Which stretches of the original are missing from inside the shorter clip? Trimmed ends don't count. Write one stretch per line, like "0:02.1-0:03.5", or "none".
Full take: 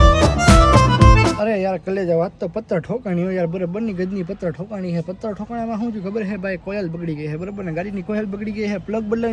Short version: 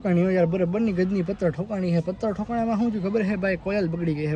none